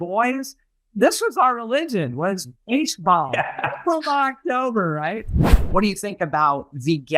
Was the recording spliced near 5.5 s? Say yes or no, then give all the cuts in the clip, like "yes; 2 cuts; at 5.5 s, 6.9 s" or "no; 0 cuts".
yes; 1 cut; at 5.5 s